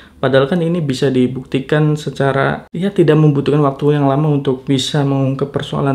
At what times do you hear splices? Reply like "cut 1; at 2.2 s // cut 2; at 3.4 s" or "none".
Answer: cut 1; at 2.7 s